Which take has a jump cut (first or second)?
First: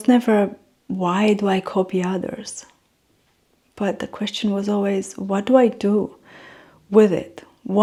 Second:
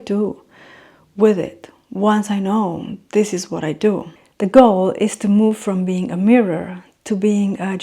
second